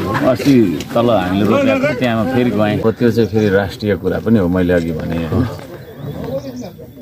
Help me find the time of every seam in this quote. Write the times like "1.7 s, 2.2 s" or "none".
2.8 s